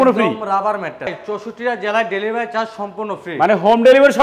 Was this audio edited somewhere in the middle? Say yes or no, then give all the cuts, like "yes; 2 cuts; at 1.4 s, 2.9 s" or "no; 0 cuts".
yes; 1 cut; at 1.1 s